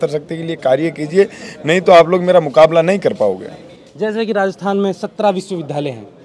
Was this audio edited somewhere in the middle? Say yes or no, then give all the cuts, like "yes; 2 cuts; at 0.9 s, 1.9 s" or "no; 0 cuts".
no; 0 cuts